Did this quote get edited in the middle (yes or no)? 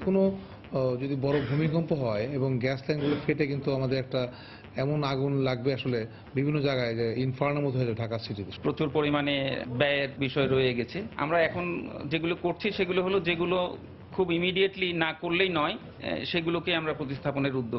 yes